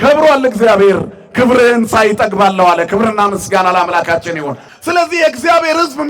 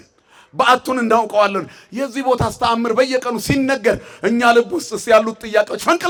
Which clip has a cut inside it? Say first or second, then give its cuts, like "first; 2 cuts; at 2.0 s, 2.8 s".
first; 1 cut; at 4.6 s